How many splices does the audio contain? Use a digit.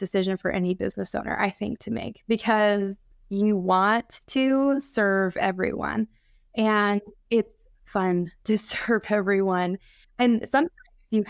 0